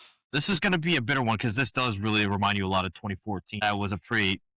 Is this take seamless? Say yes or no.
no